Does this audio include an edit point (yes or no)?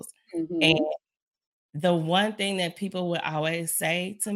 no